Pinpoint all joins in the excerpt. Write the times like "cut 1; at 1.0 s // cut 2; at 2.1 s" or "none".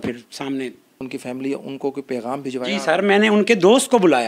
cut 1; at 1.1 s